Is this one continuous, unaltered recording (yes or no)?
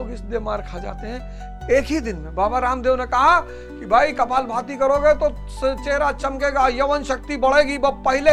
yes